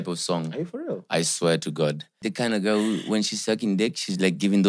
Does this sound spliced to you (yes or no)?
yes